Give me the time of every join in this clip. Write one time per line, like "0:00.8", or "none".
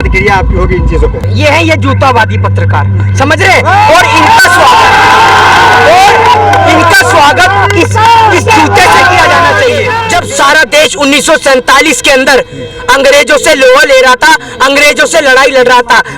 0:01.3
0:10.0